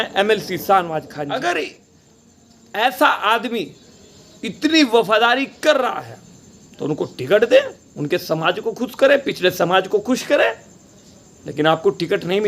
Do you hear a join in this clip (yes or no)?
yes